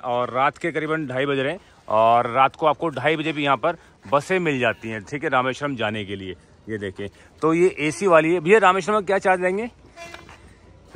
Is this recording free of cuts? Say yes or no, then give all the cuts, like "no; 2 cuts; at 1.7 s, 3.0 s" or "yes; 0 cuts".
yes; 0 cuts